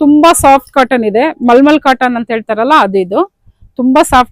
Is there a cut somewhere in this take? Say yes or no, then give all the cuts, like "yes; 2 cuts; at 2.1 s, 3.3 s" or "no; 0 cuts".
no; 0 cuts